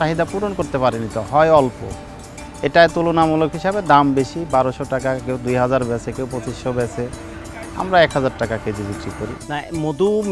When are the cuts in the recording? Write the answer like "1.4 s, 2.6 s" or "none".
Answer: 9.4 s